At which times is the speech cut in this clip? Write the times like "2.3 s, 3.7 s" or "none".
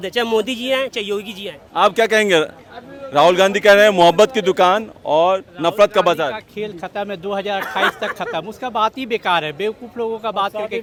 none

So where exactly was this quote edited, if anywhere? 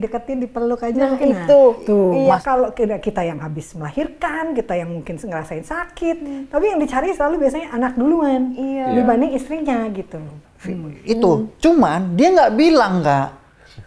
2.4 s, 10.4 s

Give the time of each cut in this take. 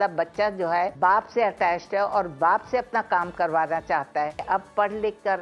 0.9 s, 4.4 s

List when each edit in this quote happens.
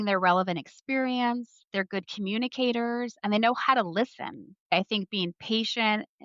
none

